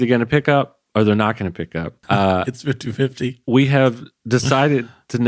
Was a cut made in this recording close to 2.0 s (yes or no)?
yes